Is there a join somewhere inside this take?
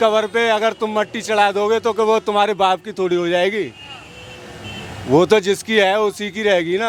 no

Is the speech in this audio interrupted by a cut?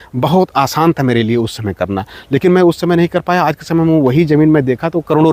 no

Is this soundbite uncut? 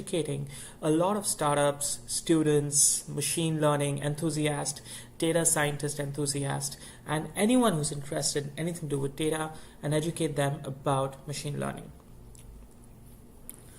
yes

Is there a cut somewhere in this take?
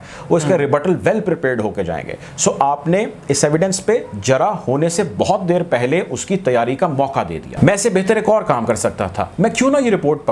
yes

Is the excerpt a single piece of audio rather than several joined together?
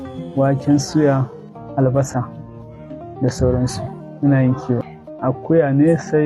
no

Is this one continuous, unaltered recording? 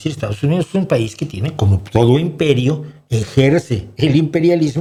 yes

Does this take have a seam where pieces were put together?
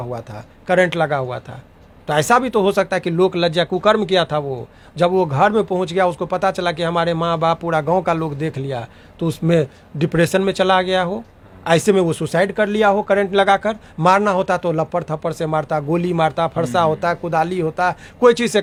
no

